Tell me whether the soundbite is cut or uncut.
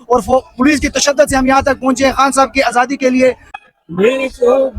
cut